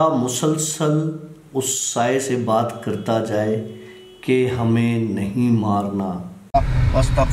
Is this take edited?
yes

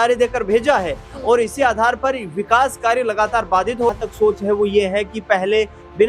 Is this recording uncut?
no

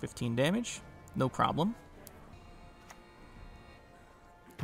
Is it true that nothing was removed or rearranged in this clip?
no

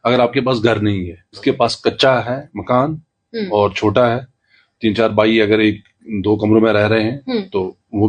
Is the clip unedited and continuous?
no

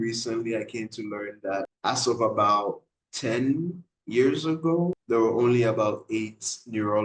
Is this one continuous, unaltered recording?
no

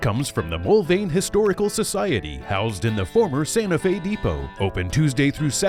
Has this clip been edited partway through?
no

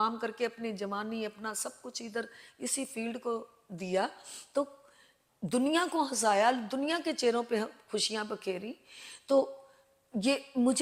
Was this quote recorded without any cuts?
yes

